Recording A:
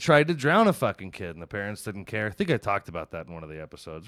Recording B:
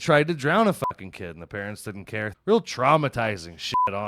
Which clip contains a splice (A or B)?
B